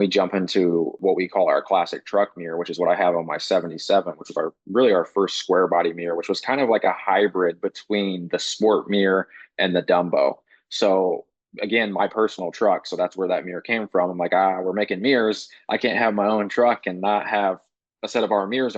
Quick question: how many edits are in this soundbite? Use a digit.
1